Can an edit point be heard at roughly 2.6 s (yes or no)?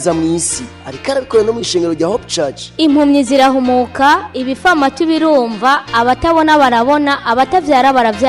yes